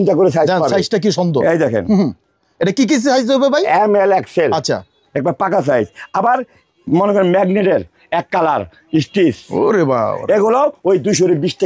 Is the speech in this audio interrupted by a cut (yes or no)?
no